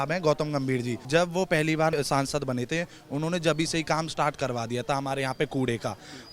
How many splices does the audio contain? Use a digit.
2